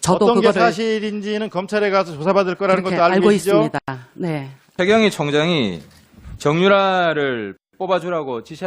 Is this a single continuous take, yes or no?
no